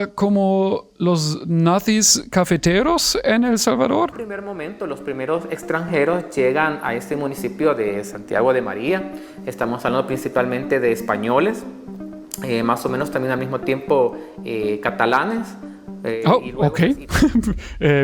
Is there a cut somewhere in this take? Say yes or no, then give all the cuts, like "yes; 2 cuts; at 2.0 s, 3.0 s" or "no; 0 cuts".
no; 0 cuts